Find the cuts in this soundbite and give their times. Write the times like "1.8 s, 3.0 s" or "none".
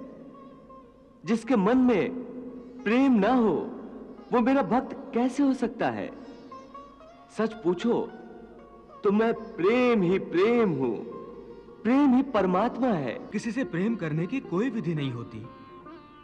13.3 s

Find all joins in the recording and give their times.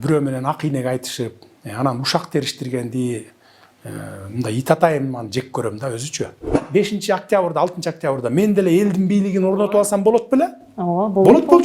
6.6 s

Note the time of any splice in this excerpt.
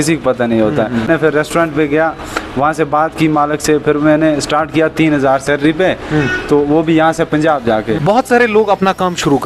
1.1 s, 8.0 s

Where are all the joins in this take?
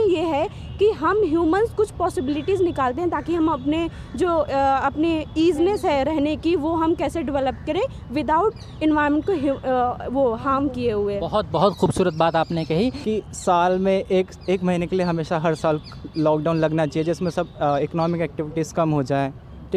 13.0 s

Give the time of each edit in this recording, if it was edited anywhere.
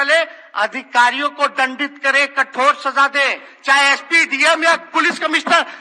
none

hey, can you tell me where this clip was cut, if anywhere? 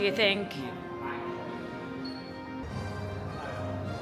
none

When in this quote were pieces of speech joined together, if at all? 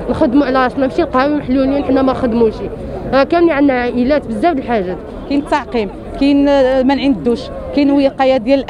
5.1 s

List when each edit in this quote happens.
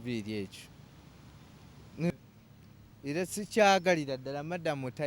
2.1 s

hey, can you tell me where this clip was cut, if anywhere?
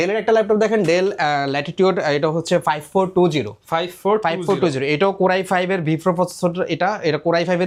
none

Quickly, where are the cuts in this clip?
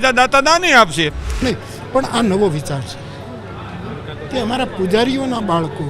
1.4 s

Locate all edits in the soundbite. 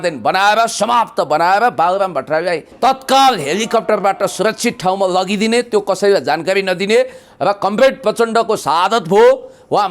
2.7 s

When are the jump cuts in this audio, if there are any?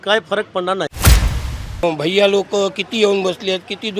1.3 s

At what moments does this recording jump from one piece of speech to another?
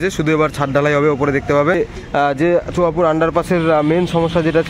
1.8 s

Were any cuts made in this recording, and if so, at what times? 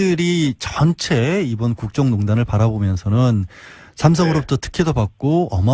1.8 s

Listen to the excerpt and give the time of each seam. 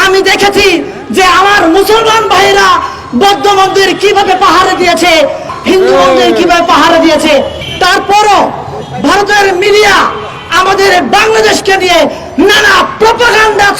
5.5 s, 7.6 s

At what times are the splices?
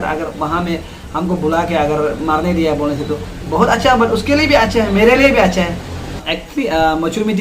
6.2 s

